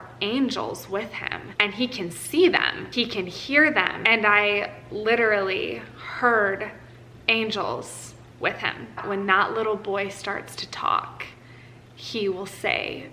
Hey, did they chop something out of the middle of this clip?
yes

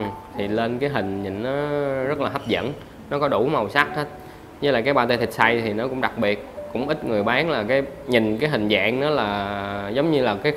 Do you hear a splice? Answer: no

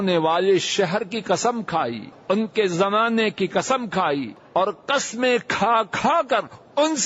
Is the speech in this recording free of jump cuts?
no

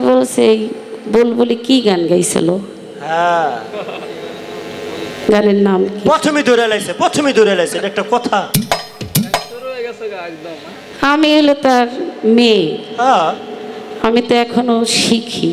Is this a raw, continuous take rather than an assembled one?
yes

